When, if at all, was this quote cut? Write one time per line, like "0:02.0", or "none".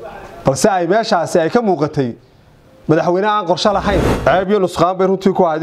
0:04.1